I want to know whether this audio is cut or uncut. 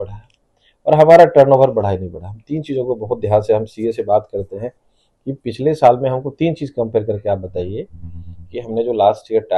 uncut